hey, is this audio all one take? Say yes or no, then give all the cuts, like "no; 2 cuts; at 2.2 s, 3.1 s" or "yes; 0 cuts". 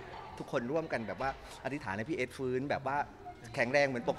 yes; 0 cuts